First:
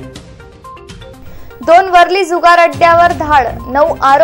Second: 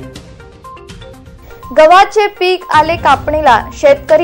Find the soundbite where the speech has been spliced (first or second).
first